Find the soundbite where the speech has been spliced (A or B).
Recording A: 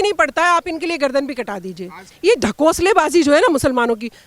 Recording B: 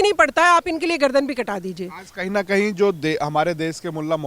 A